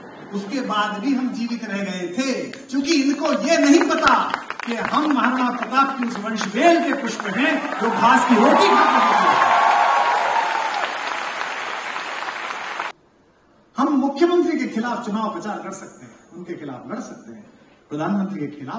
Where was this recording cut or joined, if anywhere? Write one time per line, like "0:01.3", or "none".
0:12.9